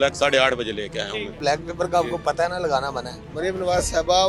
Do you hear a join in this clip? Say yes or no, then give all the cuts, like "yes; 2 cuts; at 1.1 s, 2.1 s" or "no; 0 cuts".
yes; 2 cuts; at 1.4 s, 3.1 s